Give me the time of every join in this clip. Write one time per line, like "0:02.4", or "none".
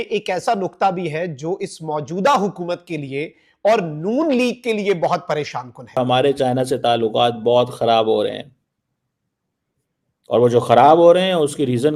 0:06.0